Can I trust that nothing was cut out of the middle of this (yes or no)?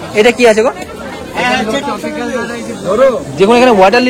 no